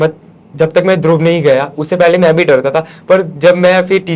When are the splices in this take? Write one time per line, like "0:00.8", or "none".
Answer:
none